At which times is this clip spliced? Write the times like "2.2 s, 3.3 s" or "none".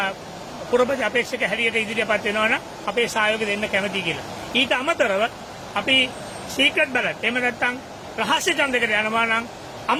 none